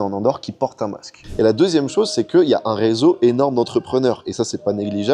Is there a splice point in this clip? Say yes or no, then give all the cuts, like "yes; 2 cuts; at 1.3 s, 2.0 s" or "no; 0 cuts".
yes; 1 cut; at 1.2 s